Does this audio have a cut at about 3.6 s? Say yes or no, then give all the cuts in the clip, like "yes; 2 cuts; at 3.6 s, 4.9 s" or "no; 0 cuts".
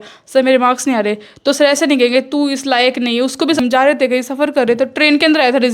yes; 1 cut; at 3.6 s